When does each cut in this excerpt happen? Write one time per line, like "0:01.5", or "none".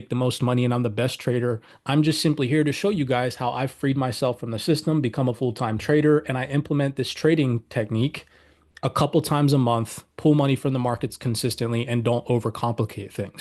0:01.7